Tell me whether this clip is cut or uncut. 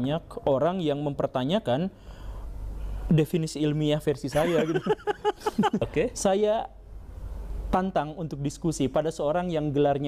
cut